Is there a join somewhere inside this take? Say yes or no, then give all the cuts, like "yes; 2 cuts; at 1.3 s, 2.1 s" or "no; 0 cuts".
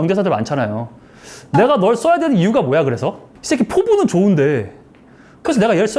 no; 0 cuts